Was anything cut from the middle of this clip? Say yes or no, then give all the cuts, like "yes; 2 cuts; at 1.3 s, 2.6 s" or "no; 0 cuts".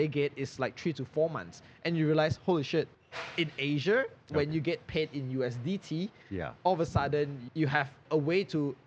yes; 2 cuts; at 3.0 s, 7.8 s